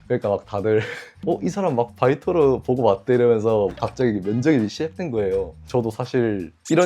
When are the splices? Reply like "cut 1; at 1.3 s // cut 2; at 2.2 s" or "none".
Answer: cut 1; at 1.1 s // cut 2; at 3.8 s // cut 3; at 5.6 s